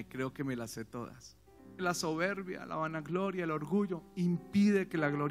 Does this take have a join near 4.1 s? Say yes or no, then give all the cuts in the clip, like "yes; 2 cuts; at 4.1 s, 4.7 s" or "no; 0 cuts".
no; 1 cut; at 1.8 s